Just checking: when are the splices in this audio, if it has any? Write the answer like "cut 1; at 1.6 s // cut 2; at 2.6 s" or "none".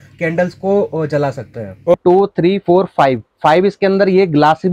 cut 1; at 1.9 s